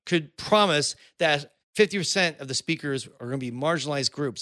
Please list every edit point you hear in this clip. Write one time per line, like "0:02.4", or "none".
0:01.6